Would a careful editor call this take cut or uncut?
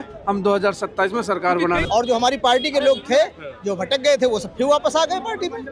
cut